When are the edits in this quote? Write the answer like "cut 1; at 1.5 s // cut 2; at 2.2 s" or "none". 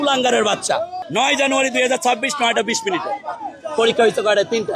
cut 1; at 1.0 s